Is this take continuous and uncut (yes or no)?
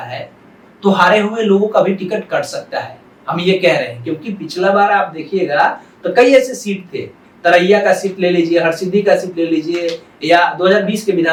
yes